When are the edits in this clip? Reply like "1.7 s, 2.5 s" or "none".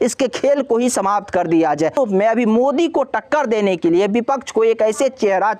2.0 s